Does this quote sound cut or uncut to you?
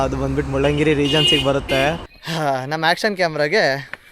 cut